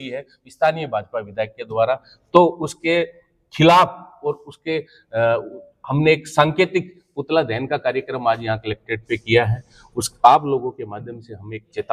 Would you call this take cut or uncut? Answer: uncut